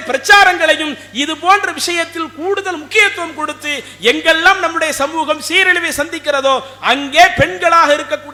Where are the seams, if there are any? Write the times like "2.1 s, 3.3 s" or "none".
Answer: none